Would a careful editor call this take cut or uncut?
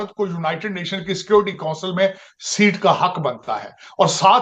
uncut